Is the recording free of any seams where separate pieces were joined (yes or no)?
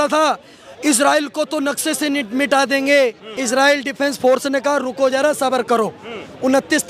no